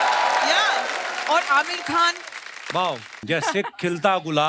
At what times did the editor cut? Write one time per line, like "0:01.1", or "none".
0:03.2